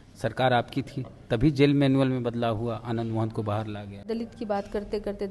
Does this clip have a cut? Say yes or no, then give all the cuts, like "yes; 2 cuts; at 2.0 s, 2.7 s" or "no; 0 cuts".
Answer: yes; 1 cut; at 4.0 s